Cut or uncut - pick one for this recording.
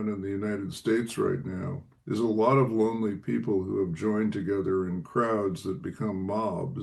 uncut